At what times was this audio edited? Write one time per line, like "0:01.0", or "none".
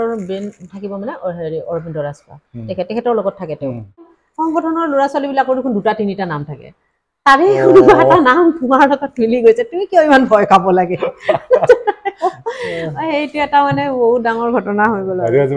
0:04.2